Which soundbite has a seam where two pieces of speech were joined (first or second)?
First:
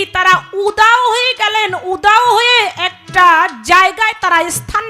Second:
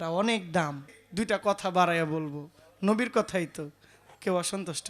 second